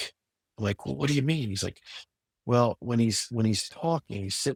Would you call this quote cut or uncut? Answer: uncut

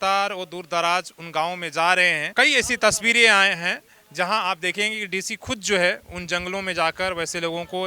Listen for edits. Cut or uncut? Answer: cut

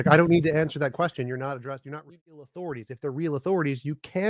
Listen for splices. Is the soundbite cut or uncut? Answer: cut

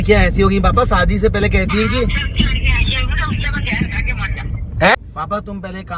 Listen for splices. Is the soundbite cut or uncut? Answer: cut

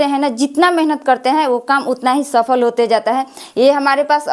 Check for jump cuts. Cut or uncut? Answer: uncut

